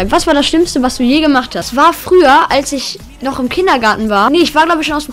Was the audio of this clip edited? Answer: yes; 2 cuts; at 1.7 s, 4.3 s

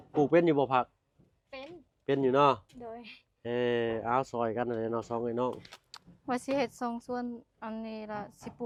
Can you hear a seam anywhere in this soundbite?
no; 0 cuts

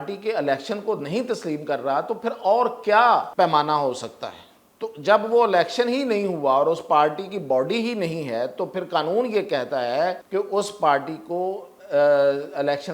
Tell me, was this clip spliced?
yes; 2 cuts; at 3.3 s, 10.2 s

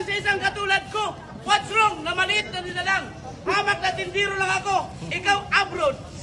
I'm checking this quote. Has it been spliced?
no; 0 cuts

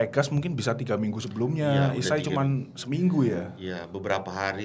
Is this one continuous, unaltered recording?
yes; 0 cuts

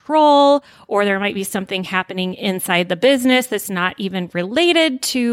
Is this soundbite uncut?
yes; 0 cuts

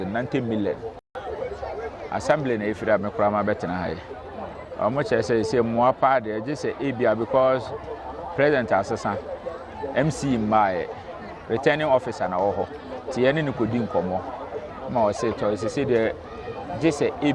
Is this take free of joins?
no; 1 cut; at 1.1 s

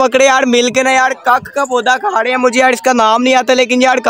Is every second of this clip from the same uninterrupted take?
yes; 0 cuts

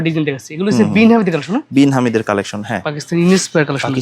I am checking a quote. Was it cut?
no; 0 cuts

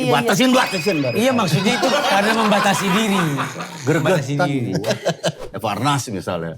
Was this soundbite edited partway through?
yes; 1 cut; at 5.4 s

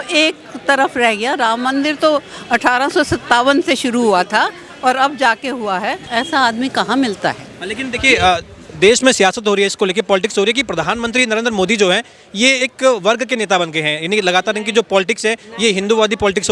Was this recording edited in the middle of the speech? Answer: no; 0 cuts

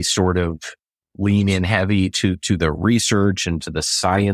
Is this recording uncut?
yes; 0 cuts

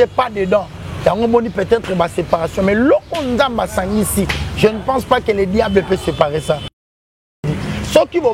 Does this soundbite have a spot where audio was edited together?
yes; 1 cut; at 7.1 s

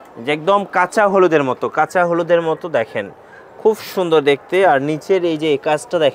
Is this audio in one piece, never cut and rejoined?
yes; 0 cuts

